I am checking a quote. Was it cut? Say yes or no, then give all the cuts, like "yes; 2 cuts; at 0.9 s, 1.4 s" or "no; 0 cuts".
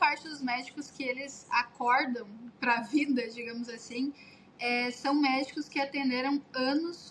no; 0 cuts